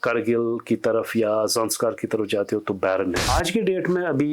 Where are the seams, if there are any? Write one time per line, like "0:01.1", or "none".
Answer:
0:03.3